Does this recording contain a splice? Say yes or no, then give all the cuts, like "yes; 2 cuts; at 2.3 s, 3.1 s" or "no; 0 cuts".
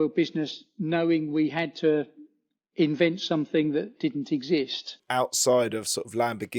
yes; 1 cut; at 5.0 s